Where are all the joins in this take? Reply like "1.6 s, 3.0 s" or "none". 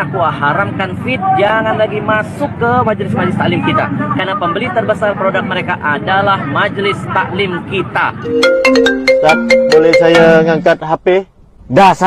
8.3 s